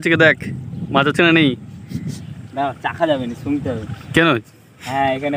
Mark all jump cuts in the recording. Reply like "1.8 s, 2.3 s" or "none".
none